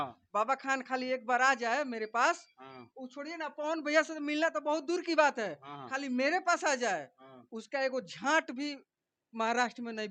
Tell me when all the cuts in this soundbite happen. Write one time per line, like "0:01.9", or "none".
none